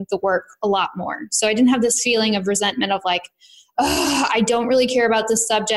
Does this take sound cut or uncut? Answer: uncut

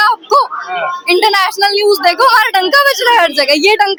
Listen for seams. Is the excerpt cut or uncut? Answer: uncut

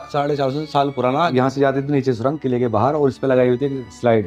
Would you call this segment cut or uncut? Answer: cut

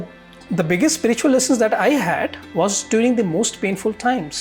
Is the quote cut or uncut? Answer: uncut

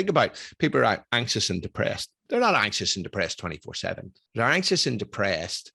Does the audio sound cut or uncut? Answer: cut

